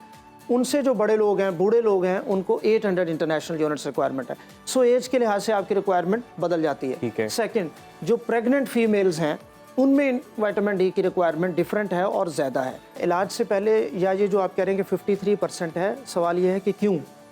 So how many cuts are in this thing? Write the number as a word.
one